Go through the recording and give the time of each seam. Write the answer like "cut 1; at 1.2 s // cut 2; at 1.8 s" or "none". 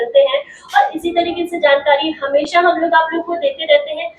none